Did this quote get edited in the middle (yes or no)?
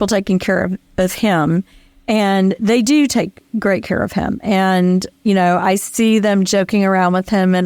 no